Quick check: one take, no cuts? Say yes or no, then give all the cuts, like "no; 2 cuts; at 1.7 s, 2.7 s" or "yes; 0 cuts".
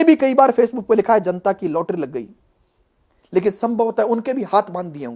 yes; 0 cuts